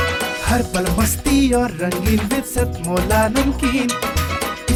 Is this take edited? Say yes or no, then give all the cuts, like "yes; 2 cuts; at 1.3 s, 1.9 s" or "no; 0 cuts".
no; 0 cuts